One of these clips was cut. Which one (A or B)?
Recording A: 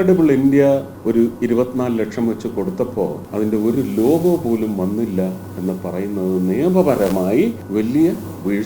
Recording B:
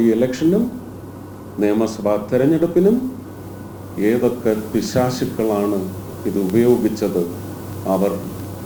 A